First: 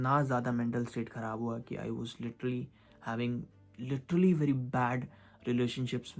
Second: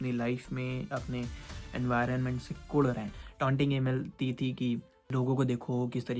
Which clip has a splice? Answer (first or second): second